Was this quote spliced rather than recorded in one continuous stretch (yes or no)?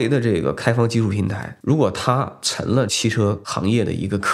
yes